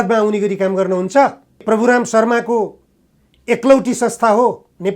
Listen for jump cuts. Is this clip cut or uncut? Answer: cut